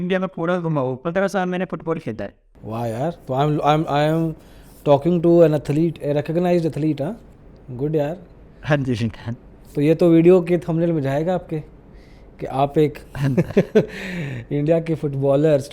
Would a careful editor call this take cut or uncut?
uncut